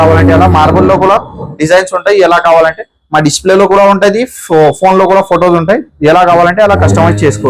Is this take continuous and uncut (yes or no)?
yes